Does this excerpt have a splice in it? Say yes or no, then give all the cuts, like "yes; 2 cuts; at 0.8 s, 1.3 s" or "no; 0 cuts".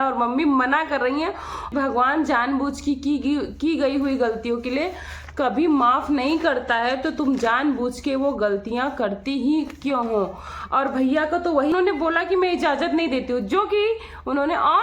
yes; 2 cuts; at 1.7 s, 11.7 s